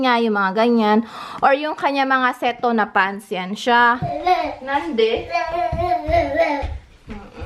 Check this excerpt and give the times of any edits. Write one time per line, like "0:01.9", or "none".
0:04.2

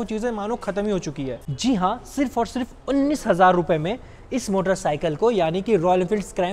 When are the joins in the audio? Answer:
0:01.4

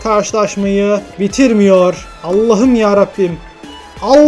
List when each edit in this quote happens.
0:01.1
0:02.1

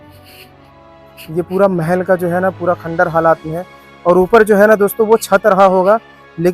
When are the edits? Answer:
0:01.3

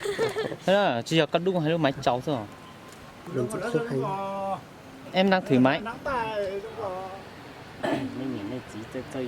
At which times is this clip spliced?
0:07.1

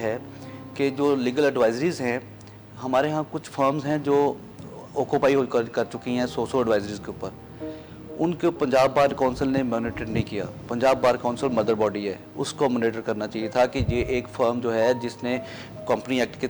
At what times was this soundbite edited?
none

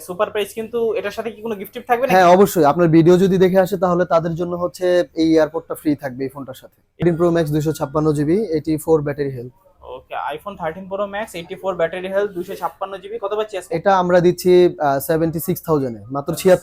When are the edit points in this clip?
0:07.0

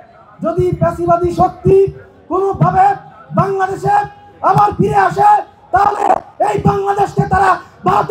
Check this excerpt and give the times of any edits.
none

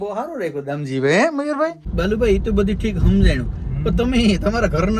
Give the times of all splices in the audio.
0:01.8

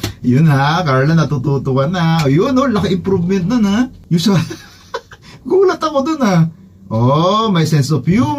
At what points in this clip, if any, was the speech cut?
0:04.0

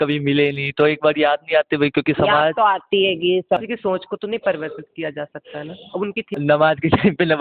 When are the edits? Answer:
0:03.6
0:06.3

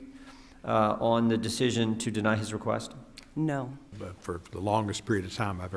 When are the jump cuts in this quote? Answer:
0:03.8

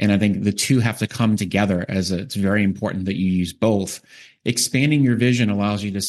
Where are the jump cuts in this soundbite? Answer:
none

